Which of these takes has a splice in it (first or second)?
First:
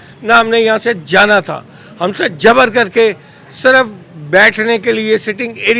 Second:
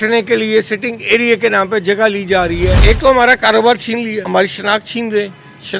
second